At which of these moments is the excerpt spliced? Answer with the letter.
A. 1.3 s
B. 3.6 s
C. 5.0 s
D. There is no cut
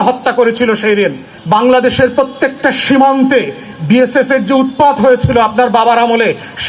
A